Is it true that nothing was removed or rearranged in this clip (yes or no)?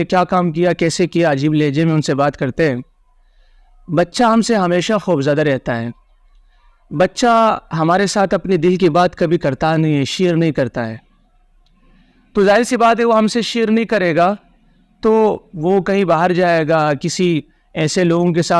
yes